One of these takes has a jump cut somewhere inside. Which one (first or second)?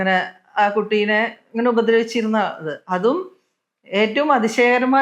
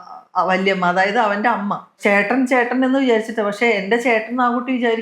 second